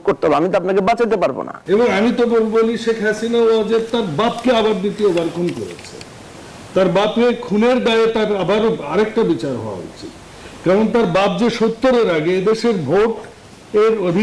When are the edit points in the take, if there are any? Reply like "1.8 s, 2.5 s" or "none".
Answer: 1.5 s